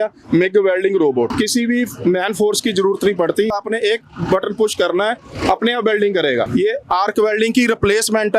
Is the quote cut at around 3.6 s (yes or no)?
yes